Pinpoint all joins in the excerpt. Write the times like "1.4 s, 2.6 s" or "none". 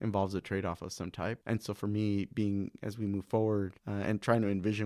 1.4 s, 3.8 s